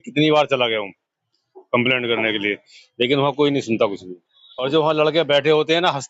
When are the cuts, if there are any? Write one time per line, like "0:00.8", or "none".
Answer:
none